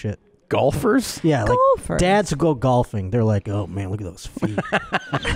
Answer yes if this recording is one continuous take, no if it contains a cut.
yes